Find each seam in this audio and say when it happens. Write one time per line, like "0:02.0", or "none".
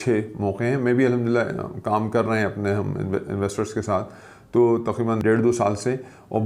0:05.2